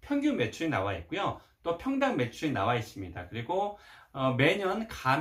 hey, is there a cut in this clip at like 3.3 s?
no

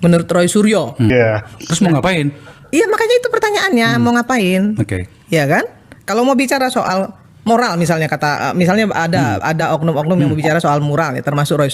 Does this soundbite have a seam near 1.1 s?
yes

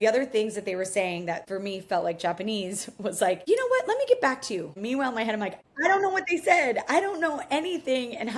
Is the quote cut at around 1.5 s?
yes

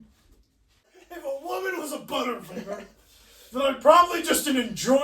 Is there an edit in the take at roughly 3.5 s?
no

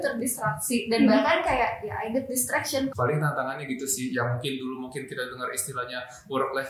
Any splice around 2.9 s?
yes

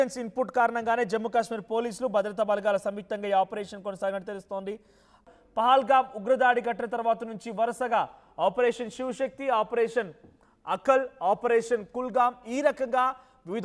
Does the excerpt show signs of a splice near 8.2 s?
no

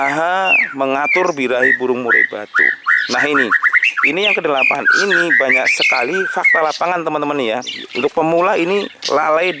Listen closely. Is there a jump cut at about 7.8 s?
yes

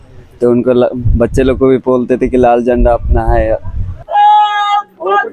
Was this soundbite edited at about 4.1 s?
yes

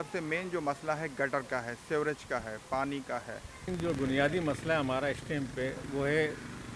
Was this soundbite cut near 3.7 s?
yes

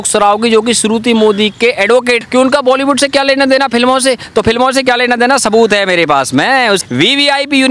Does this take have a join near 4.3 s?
no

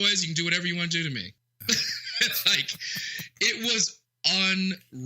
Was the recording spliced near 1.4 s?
yes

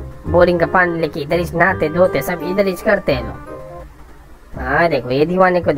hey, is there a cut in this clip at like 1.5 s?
no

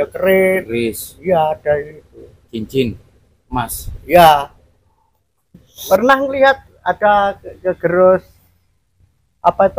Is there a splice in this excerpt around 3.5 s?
no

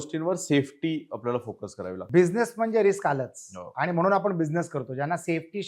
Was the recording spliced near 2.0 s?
yes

